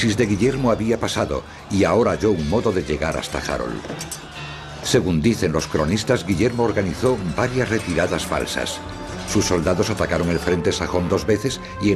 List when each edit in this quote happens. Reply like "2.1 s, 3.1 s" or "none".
4.7 s